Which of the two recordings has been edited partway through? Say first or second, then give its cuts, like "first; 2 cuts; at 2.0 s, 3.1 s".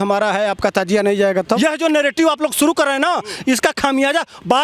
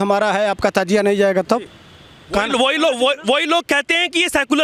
first; 1 cut; at 1.6 s